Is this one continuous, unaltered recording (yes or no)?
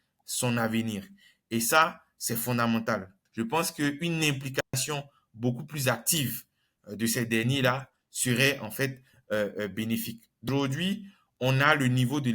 no